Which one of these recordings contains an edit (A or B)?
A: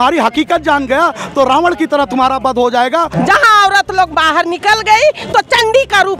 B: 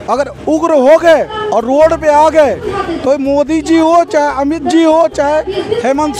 A